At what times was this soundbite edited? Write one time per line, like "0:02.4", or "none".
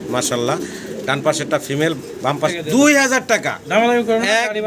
0:02.6